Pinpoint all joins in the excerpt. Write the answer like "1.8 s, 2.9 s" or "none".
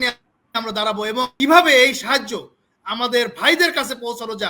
1.3 s